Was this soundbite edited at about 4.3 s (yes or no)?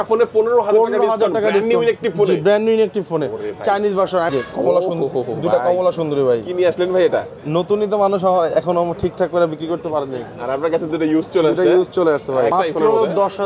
yes